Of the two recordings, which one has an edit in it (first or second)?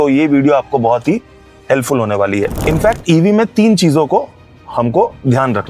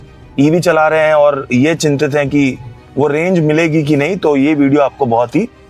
first